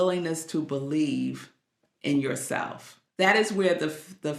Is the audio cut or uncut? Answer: cut